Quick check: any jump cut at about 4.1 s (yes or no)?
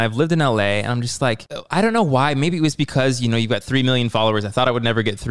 no